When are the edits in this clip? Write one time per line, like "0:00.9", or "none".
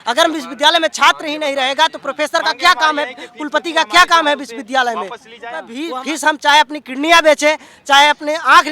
0:05.8